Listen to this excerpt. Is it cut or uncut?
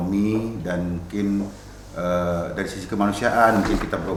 uncut